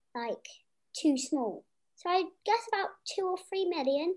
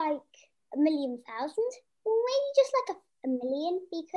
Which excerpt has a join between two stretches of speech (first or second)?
second